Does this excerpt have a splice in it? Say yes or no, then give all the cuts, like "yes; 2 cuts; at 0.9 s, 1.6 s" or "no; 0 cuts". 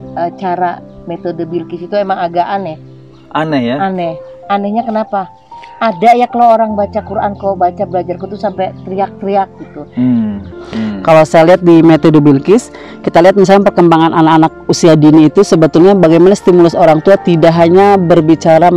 yes; 1 cut; at 10.5 s